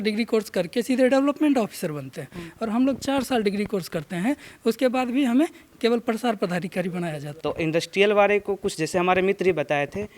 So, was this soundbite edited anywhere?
yes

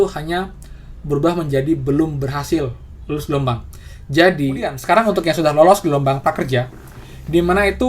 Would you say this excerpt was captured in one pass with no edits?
no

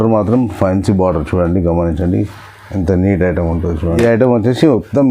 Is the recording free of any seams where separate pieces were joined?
no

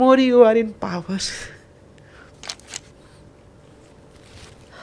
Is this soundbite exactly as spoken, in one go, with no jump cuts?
no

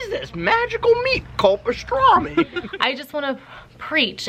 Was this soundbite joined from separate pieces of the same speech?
yes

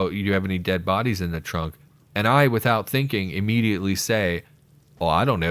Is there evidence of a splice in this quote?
no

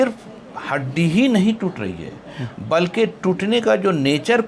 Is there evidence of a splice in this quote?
no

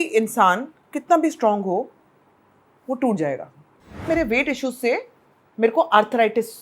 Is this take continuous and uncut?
no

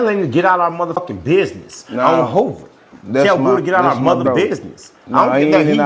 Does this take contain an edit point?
yes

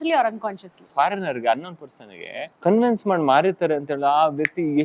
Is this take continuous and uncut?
no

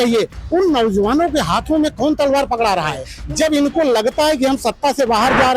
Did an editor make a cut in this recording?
yes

